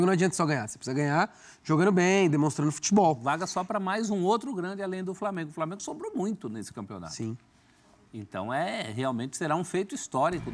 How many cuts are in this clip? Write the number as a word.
one